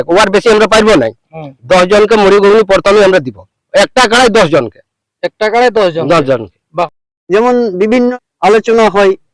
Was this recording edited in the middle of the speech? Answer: yes; 2 cuts; at 6.6 s, 8.1 s

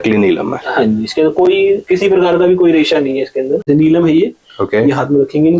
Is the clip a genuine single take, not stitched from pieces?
no; 1 cut; at 3.6 s

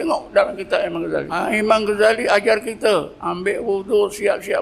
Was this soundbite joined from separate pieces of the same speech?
yes; 1 cut; at 1.4 s

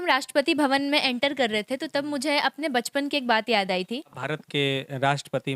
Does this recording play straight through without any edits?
no; 1 cut; at 4.1 s

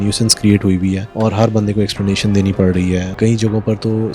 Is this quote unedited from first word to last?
no; 2 cuts; at 1.1 s, 3.2 s

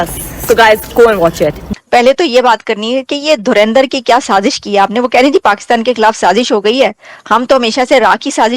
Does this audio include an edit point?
yes; 1 cut; at 1.7 s

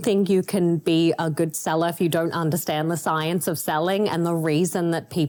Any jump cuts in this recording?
no; 0 cuts

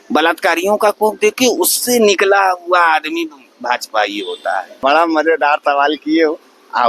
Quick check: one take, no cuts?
no; 1 cut; at 4.7 s

